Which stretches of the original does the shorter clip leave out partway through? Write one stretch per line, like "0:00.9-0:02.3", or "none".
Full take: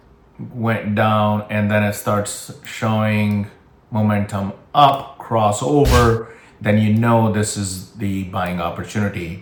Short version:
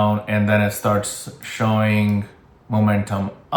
none